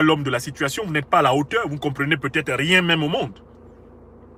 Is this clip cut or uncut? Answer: uncut